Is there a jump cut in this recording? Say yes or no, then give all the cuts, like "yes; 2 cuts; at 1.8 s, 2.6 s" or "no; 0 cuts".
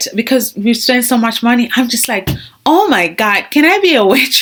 no; 0 cuts